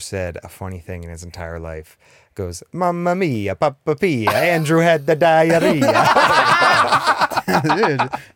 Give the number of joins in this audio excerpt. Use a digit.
0